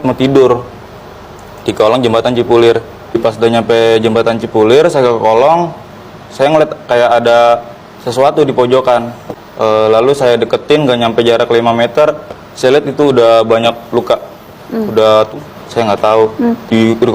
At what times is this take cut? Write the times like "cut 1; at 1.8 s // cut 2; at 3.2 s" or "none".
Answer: cut 1; at 15.4 s